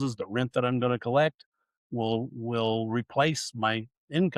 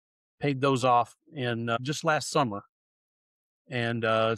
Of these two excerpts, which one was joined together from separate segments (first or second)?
second